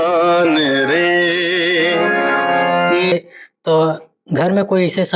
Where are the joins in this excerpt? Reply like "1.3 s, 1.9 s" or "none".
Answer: 3.1 s